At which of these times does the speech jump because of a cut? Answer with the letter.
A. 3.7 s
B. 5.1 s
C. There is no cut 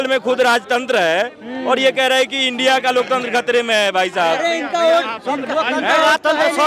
C